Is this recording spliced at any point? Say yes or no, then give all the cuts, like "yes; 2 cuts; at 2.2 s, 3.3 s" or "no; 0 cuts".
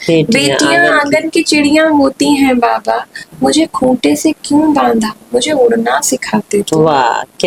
no; 0 cuts